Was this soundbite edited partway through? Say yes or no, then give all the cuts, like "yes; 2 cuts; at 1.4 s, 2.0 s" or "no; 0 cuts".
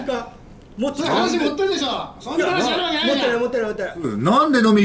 no; 0 cuts